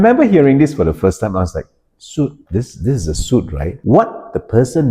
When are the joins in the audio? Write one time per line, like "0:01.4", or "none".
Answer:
0:02.4
0:03.7